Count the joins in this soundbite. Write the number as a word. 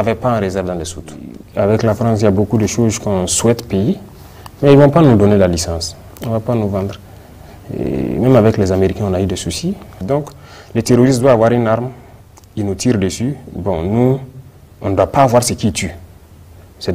one